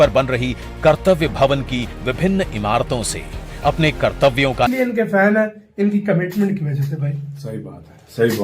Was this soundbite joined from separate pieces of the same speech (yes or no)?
yes